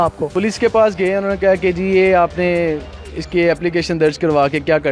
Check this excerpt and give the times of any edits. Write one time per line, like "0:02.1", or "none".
none